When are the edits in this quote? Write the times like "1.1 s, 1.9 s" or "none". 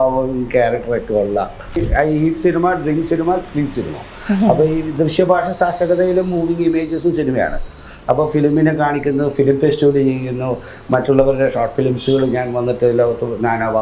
1.8 s